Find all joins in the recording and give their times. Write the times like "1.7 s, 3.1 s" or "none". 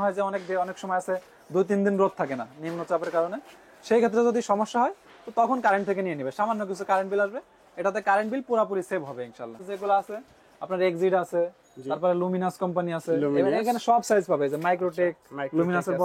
none